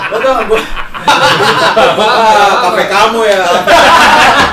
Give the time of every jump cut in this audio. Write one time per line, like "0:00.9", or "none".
0:01.1